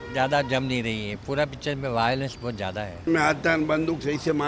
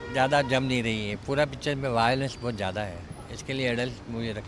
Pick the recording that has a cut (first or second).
first